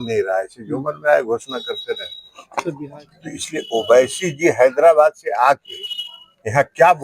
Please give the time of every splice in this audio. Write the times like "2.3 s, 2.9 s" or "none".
2.8 s